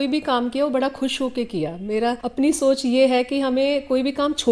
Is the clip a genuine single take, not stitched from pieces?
no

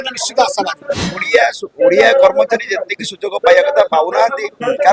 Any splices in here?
yes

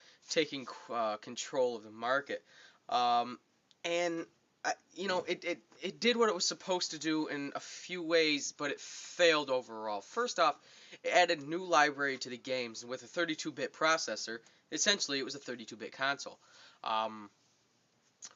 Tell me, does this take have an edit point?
no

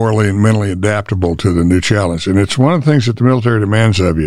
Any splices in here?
no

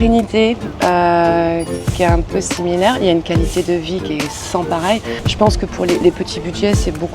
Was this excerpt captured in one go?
no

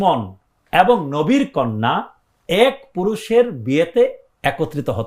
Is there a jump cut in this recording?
no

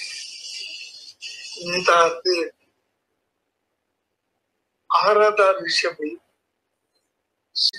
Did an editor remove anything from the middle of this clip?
no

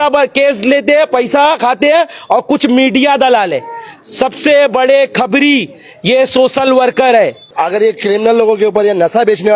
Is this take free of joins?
no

